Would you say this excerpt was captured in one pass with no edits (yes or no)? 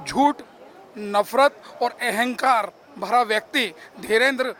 yes